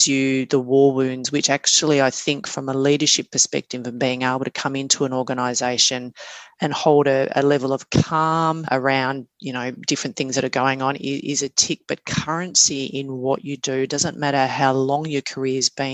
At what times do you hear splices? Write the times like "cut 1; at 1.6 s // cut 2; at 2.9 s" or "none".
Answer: cut 1; at 8.6 s